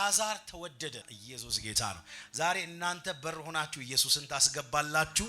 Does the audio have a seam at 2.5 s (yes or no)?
no